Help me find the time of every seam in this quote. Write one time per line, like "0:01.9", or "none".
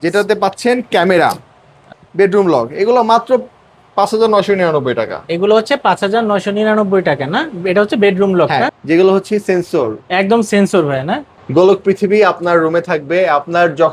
0:01.9
0:08.7
0:11.3